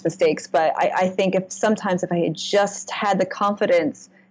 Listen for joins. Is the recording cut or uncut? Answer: uncut